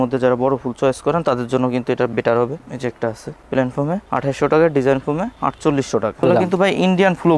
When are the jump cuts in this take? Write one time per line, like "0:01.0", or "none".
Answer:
0:02.6
0:06.2